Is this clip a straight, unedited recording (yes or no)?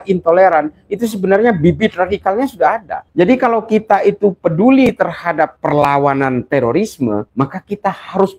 no